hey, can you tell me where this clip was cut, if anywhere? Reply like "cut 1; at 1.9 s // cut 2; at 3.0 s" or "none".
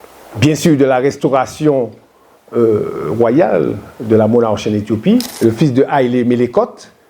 cut 1; at 5.3 s